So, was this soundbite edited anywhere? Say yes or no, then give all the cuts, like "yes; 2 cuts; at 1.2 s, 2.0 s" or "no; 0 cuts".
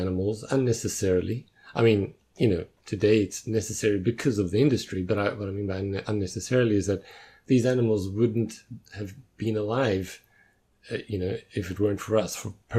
no; 0 cuts